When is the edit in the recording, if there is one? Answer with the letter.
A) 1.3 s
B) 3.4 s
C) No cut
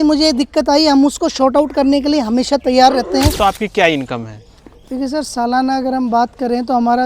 B